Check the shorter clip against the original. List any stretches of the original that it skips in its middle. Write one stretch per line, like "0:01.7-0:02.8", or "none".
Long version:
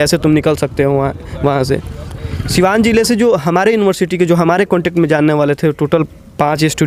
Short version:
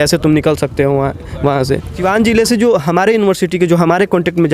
0:02.0-0:02.6